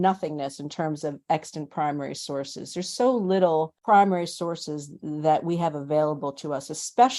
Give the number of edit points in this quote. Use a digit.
1